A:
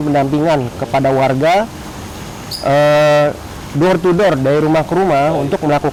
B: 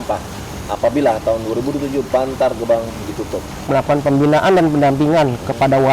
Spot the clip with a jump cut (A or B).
B